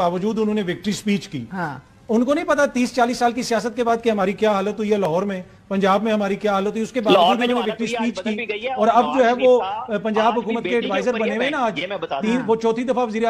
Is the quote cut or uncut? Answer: uncut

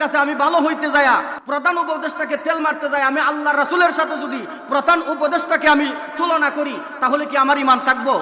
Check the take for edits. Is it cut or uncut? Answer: uncut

